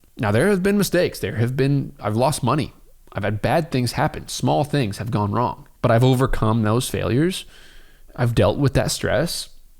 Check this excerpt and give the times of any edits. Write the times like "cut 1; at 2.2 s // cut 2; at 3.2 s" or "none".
none